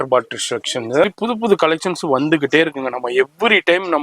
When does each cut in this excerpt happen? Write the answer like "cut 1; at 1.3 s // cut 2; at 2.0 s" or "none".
cut 1; at 1.0 s